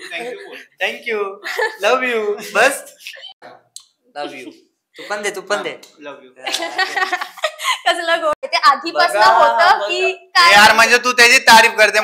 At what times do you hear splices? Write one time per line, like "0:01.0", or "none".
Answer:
0:03.3
0:08.4

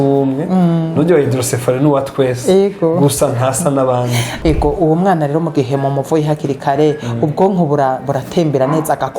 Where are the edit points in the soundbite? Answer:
0:04.3

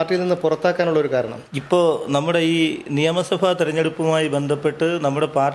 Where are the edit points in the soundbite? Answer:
none

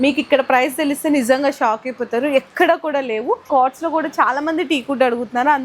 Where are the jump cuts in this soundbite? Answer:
0:03.4

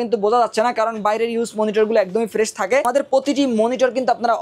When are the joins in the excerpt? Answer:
0:02.8

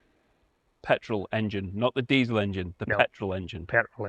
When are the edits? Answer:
none

